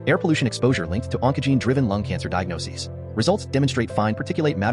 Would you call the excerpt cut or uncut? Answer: uncut